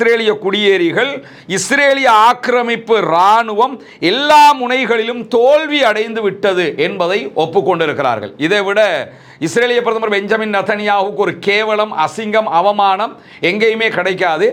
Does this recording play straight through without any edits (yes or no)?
yes